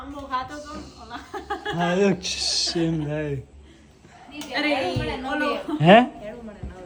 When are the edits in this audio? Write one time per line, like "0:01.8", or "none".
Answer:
none